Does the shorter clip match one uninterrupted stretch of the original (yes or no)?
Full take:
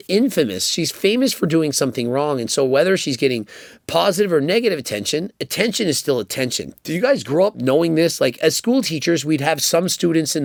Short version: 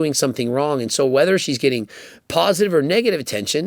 yes